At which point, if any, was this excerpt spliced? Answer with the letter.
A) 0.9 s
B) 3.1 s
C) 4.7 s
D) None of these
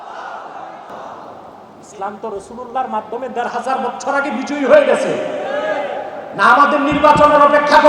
A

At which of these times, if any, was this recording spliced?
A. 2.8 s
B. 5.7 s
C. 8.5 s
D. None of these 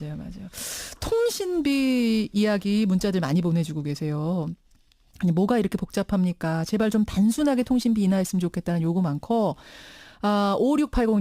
A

